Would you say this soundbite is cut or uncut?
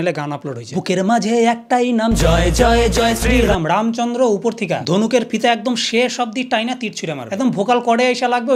uncut